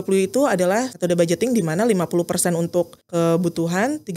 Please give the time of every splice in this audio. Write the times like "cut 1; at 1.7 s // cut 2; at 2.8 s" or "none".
cut 1; at 0.9 s // cut 2; at 3.0 s